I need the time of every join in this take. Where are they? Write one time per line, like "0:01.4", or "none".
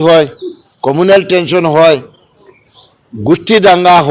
none